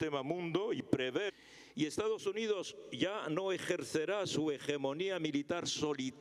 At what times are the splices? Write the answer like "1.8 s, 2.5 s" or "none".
none